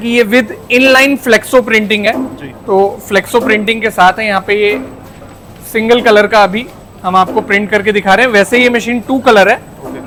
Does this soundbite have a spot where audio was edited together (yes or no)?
no